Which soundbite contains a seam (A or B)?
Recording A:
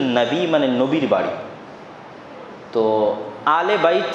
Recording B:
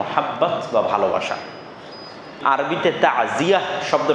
B